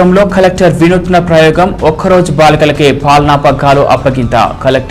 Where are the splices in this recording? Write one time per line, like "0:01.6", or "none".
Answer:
none